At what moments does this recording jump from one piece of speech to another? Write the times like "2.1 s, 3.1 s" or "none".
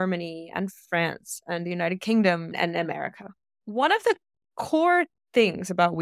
2.5 s